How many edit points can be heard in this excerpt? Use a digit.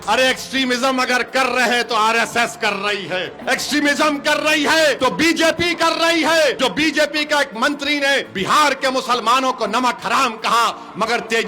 4